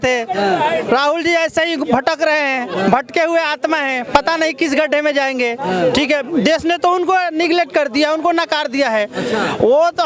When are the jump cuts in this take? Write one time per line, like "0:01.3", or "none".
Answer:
none